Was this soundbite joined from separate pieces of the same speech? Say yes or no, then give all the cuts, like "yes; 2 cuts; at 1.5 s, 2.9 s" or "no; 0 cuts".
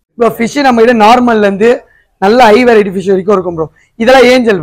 no; 0 cuts